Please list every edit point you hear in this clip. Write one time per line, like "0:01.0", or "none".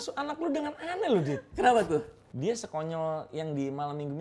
0:02.2